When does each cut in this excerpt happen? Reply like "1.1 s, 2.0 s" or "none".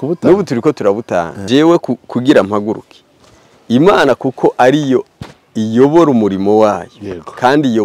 1.4 s